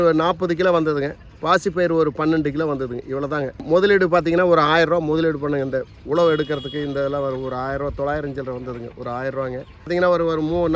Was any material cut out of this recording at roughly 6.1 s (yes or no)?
no